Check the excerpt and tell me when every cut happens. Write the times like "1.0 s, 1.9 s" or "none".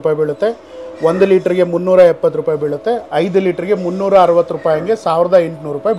none